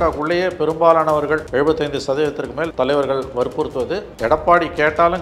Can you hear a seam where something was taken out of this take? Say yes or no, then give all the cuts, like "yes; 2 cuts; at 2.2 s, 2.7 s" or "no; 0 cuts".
yes; 3 cuts; at 1.4 s, 2.7 s, 4.1 s